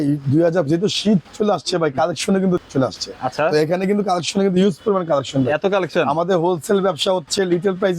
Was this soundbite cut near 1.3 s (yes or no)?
yes